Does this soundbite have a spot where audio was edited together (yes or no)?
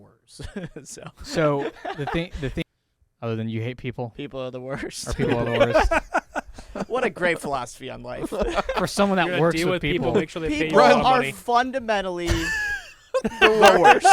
yes